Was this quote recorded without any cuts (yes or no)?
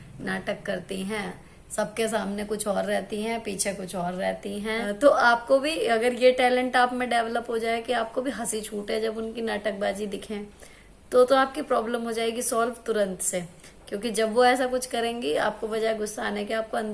no